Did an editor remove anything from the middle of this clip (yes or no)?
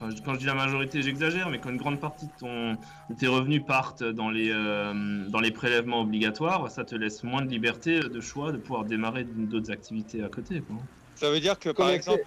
yes